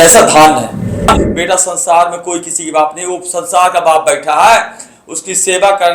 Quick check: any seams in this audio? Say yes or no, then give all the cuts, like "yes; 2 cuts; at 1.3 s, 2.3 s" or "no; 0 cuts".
yes; 1 cut; at 1.1 s